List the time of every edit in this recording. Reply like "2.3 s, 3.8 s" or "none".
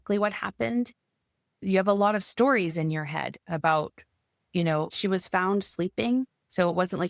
1.6 s, 4.9 s